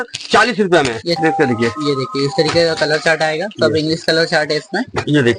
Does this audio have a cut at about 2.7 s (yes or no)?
no